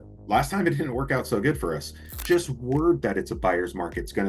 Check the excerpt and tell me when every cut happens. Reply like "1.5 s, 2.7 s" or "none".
2.0 s